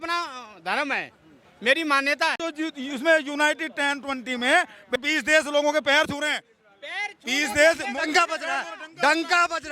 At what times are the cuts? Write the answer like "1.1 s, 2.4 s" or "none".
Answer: 2.4 s, 5.0 s